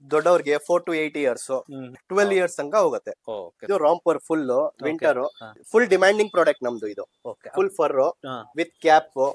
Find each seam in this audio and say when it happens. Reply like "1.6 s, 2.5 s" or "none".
1.9 s, 3.7 s, 5.4 s